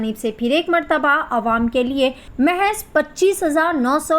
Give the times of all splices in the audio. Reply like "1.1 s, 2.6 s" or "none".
2.2 s

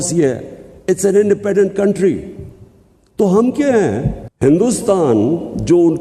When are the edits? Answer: 4.1 s

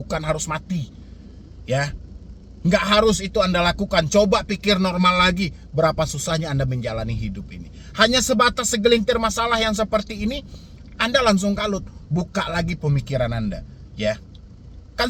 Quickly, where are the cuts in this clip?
none

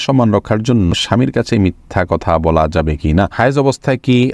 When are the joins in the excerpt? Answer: 0.9 s, 3.3 s

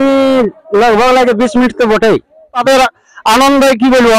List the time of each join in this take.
2.6 s

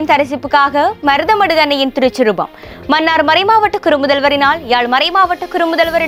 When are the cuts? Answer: none

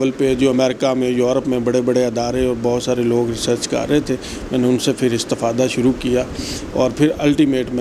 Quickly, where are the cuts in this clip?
none

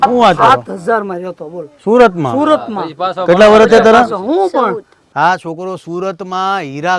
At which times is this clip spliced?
none

